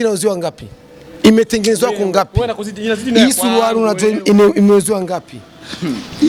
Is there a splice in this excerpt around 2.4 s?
no; 0 cuts

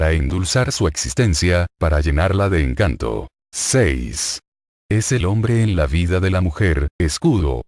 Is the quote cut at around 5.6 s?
no; 1 cut; at 3.8 s

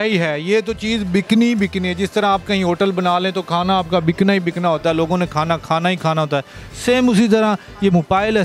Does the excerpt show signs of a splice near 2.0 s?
no; 0 cuts

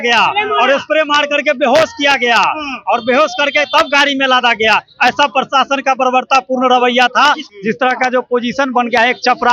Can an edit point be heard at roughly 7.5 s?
yes; 1 cut; at 7.5 s

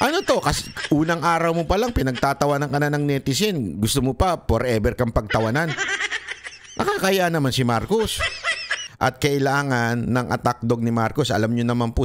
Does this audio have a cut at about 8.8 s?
yes; 1 cut; at 8.8 s

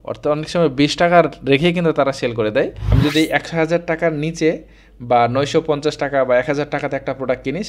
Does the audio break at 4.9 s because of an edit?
no; 1 cut; at 2.8 s

